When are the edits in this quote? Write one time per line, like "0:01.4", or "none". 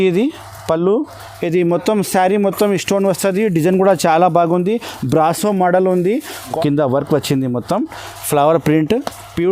0:06.5